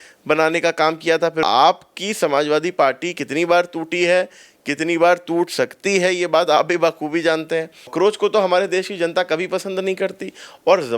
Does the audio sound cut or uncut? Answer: cut